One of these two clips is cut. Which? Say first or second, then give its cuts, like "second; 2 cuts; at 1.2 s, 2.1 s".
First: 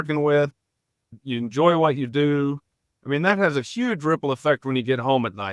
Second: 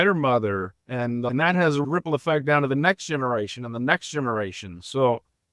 second; 1 cut; at 1.8 s